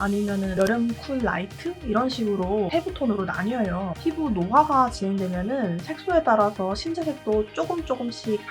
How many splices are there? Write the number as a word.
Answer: one